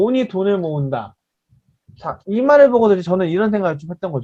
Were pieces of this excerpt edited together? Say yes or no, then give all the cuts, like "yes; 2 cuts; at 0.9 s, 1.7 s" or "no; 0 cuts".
no; 0 cuts